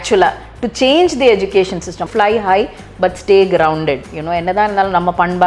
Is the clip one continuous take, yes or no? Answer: no